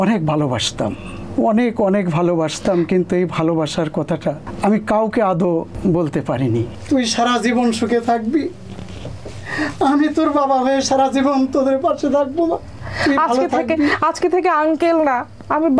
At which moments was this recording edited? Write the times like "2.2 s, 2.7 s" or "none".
4.5 s, 5.7 s, 6.7 s, 12.8 s